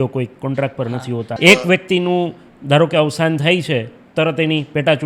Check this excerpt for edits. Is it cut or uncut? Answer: cut